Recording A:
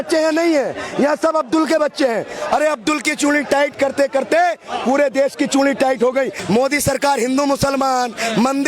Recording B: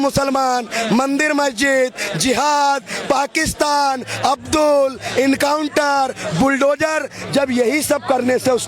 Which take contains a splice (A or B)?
A